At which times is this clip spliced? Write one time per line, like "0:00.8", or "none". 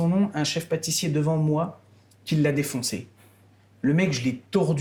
none